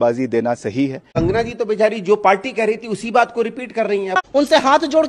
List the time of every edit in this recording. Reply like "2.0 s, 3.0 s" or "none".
1.2 s, 4.2 s